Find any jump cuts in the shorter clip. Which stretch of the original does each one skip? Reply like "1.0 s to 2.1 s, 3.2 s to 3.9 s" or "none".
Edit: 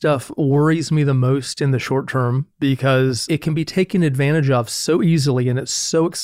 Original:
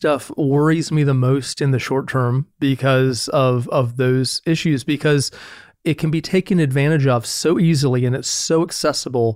3.2 s to 5.8 s